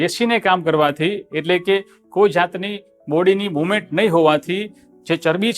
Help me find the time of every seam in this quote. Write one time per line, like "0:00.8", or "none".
none